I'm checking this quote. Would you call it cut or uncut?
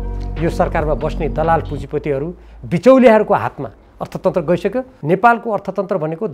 cut